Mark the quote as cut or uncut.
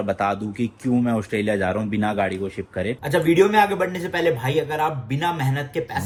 uncut